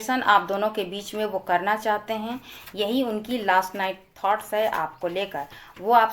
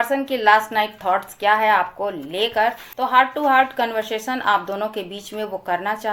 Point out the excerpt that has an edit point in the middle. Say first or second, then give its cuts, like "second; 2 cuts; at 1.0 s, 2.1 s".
second; 1 cut; at 2.9 s